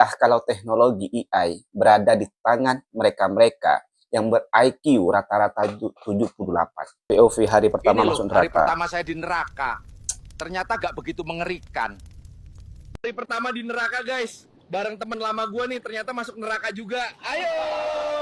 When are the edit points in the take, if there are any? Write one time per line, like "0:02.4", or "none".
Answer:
0:06.9